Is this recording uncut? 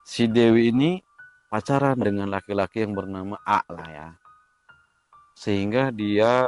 yes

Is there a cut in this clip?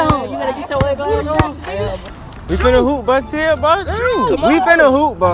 yes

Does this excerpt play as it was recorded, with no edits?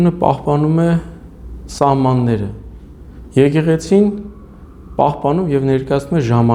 yes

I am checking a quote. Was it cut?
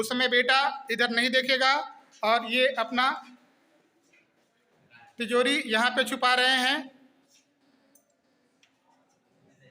no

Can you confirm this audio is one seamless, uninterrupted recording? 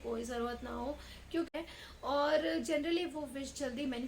no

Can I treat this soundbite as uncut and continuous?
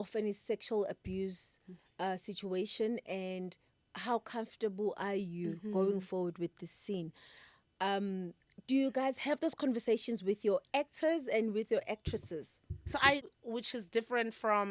no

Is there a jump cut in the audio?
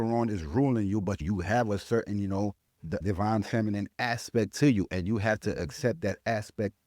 yes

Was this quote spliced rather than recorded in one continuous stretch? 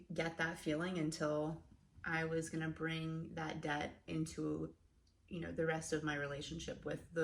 no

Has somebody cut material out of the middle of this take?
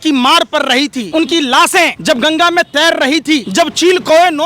yes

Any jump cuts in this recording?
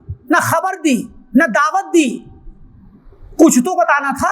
no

